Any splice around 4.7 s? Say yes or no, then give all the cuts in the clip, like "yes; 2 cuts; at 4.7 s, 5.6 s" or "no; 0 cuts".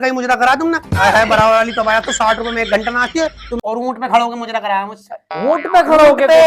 no; 1 cut; at 3.5 s